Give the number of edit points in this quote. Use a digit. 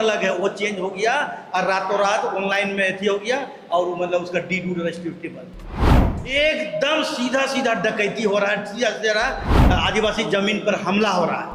0